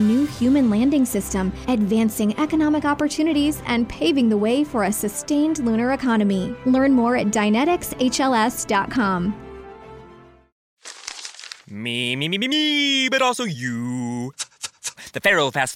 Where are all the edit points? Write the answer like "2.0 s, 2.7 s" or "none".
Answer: 10.6 s